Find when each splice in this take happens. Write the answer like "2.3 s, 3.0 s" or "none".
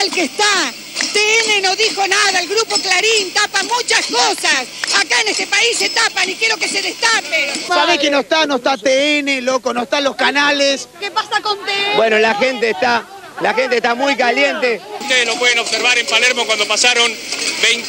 14.9 s